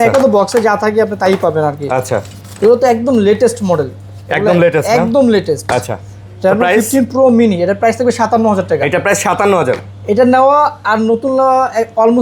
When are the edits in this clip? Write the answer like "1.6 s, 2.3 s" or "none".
none